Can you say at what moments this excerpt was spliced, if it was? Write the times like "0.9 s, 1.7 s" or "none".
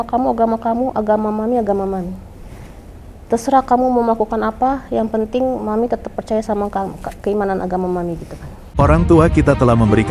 8.6 s